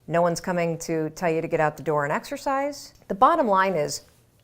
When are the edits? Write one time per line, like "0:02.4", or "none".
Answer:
0:02.9